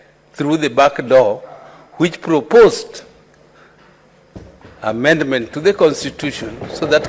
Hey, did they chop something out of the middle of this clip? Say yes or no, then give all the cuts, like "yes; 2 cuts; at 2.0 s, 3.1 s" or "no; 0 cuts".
no; 0 cuts